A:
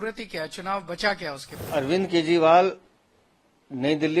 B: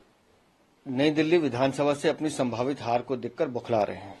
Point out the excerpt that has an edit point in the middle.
A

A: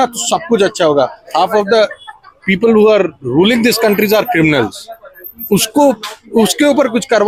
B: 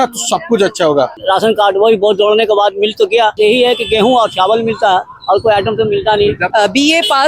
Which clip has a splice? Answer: B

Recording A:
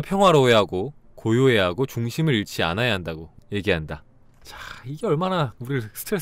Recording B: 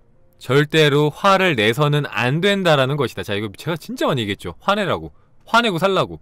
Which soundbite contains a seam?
A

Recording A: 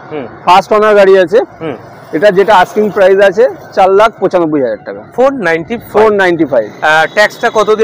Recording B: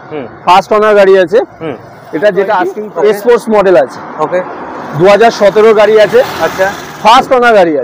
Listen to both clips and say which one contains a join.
B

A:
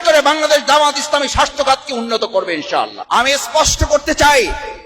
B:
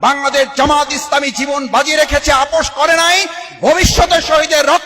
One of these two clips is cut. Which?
A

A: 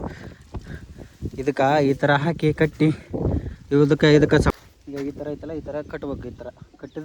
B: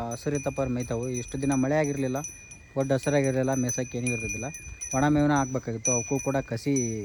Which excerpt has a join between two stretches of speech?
A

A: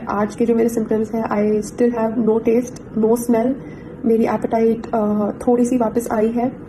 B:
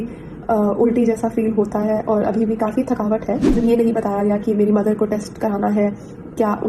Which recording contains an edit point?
B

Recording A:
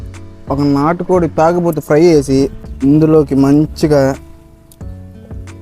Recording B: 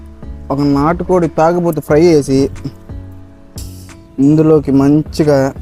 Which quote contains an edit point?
A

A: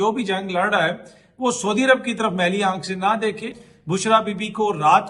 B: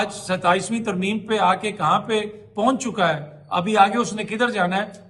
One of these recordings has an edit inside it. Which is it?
A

